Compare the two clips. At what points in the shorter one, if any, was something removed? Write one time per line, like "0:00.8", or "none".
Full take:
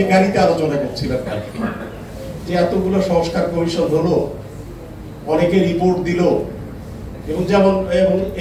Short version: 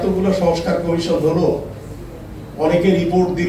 none